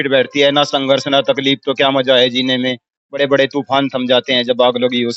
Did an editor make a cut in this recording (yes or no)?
no